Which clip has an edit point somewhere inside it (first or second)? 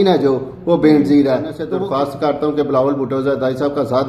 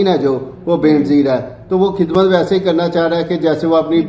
first